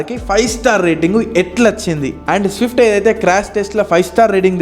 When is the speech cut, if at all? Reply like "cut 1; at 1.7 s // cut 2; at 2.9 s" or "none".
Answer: cut 1; at 2.2 s